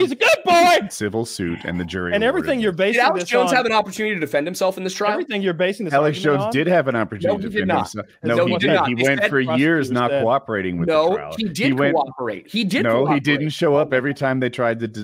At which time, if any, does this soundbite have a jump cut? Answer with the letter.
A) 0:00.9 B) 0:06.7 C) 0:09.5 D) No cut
A